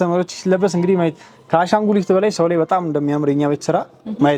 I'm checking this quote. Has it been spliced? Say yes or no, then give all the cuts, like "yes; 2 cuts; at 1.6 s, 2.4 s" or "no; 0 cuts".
no; 0 cuts